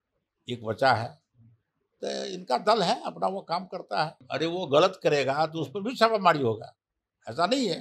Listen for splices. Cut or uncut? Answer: cut